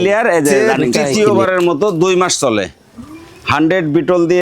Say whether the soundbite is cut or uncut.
cut